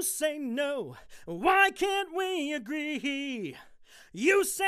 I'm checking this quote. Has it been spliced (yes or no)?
yes